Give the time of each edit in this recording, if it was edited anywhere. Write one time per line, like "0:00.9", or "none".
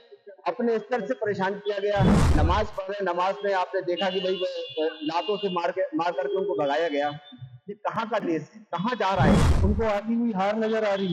0:02.3
0:09.5